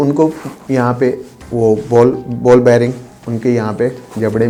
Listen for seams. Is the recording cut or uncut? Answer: uncut